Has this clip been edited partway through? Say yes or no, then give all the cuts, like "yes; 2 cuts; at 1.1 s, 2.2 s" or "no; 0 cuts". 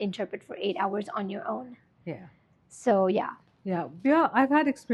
no; 0 cuts